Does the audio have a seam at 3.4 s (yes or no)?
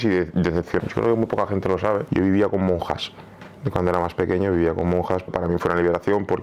no